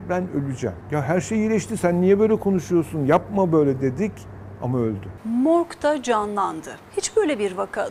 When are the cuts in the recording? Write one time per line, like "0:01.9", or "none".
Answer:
0:00.8
0:05.1
0:06.7